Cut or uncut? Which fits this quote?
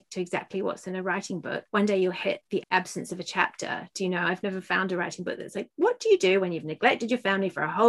cut